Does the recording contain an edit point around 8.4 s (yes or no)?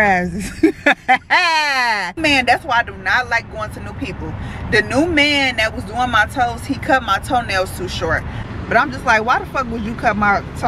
yes